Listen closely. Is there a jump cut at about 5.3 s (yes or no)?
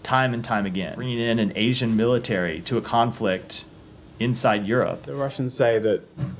yes